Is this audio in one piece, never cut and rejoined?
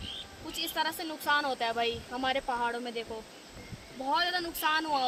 yes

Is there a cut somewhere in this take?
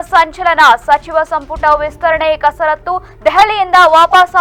no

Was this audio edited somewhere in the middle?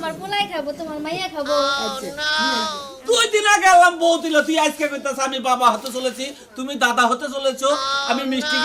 yes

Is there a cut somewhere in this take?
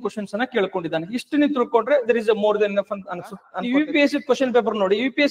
yes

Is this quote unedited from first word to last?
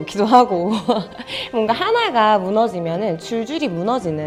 yes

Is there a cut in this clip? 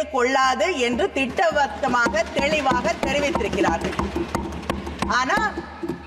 no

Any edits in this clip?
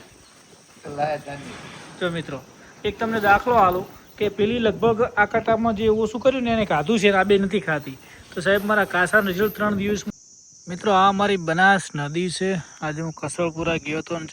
yes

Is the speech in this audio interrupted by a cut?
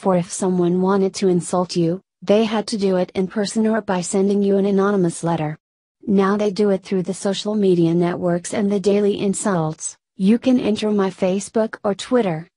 no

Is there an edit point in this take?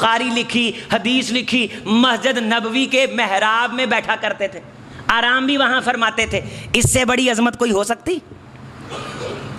no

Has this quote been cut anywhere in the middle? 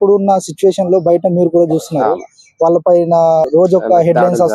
yes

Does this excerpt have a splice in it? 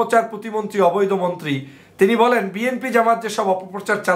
no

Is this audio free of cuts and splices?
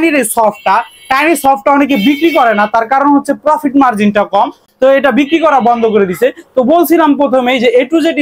yes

